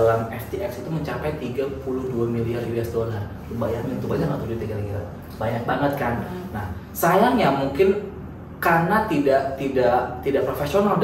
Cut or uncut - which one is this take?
uncut